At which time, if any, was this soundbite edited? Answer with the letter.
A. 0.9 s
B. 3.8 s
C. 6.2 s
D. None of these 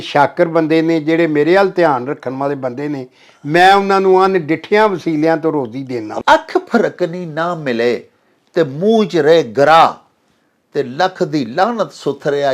C